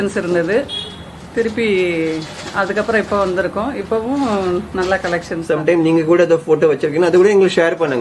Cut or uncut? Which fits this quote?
cut